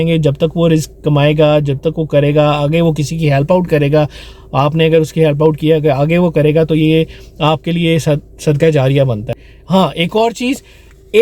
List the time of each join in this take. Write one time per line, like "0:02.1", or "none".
0:09.3